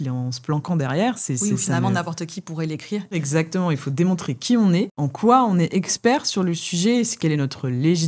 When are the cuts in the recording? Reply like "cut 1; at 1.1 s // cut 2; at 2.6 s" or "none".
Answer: cut 1; at 3.2 s